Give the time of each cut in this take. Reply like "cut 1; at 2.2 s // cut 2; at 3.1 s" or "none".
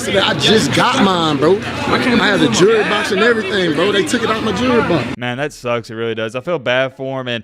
cut 1; at 5.2 s